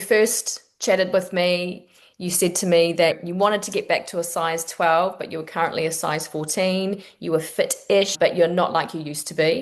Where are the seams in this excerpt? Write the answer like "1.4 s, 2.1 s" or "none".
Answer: 3.2 s, 8.1 s